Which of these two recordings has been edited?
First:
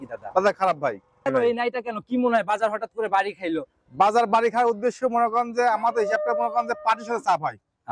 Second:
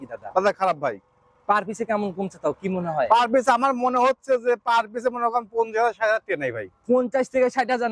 first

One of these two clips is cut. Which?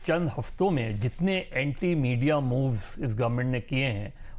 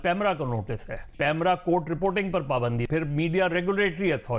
second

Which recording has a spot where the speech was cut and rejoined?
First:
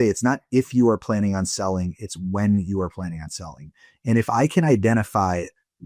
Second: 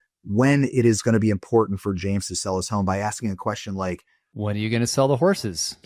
second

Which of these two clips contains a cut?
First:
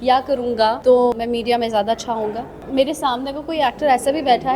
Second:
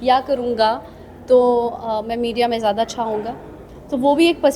first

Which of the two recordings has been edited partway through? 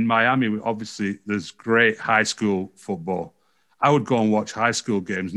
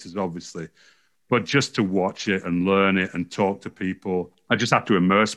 second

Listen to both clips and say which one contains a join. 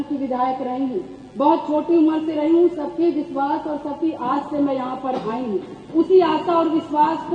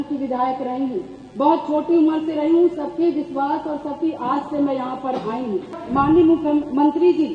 second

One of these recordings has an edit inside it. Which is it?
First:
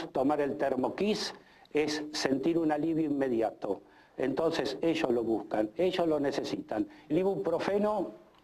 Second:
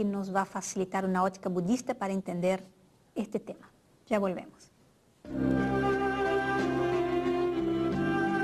first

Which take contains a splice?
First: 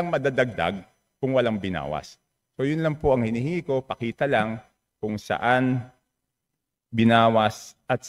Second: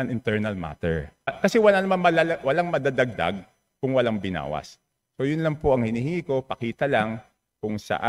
second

